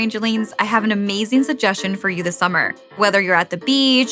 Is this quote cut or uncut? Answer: cut